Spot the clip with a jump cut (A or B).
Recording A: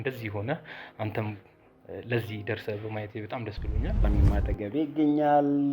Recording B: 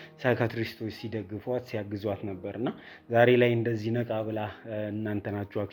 A